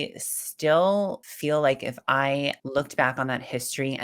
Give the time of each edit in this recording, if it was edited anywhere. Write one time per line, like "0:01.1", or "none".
0:01.3
0:02.6